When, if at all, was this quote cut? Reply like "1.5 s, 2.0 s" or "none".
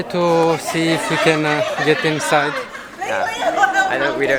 none